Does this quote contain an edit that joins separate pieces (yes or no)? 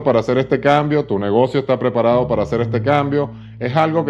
no